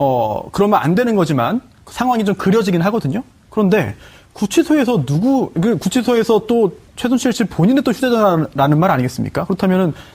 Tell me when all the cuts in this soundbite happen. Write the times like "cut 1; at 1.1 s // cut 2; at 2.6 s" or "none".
cut 1; at 1.1 s